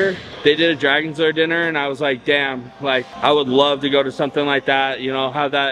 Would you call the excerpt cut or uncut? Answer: uncut